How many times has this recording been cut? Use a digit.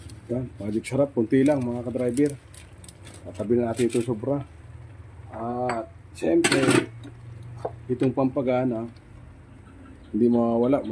0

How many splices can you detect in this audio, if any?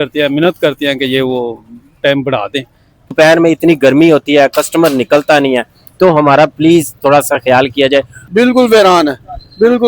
2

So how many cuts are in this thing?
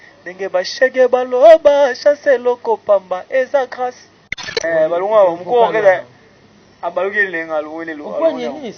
1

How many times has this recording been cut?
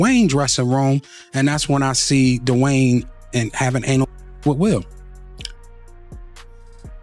0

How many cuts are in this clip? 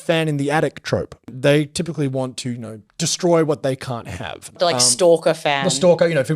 2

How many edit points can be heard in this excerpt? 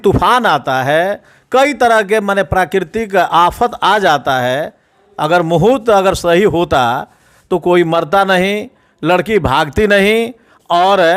0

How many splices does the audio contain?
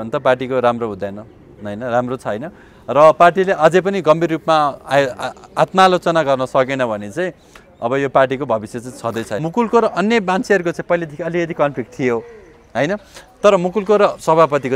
1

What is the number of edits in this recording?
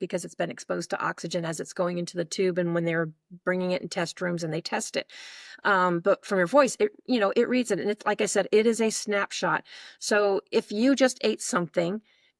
0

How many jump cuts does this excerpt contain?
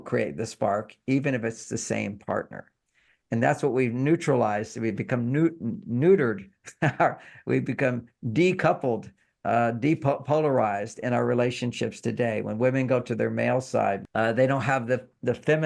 1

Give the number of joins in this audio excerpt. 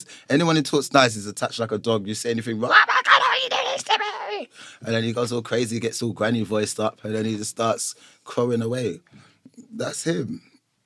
0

